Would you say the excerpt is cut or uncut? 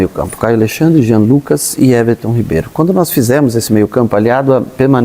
uncut